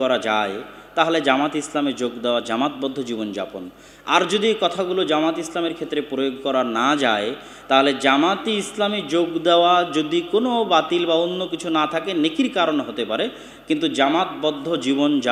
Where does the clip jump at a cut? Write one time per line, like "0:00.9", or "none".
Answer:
none